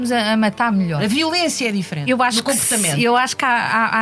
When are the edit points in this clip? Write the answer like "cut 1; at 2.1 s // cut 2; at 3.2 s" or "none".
cut 1; at 1.0 s // cut 2; at 2.0 s